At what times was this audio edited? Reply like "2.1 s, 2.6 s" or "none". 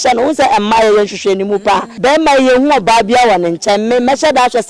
1.9 s